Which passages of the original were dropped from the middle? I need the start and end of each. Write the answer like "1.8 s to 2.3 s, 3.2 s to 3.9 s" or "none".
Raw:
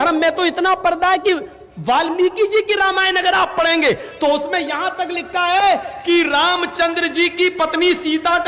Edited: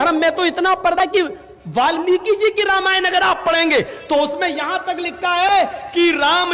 1.0 s to 1.1 s